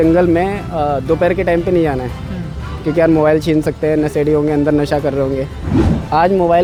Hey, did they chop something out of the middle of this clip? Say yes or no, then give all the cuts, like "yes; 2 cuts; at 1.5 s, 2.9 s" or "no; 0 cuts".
no; 0 cuts